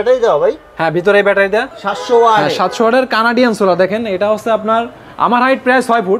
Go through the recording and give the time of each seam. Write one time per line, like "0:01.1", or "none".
0:01.7